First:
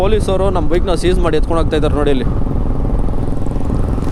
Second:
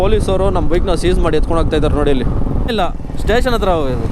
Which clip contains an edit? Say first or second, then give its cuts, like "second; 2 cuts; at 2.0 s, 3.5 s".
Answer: second; 1 cut; at 2.7 s